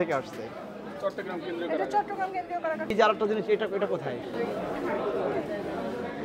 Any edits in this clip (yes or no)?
yes